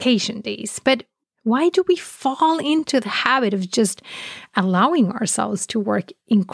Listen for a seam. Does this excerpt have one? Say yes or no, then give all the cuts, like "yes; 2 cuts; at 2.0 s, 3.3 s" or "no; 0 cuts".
no; 0 cuts